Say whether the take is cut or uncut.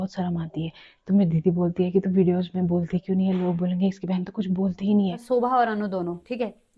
cut